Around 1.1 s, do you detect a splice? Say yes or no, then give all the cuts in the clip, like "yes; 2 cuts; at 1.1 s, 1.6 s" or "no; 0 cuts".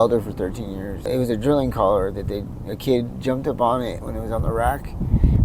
yes; 1 cut; at 1.1 s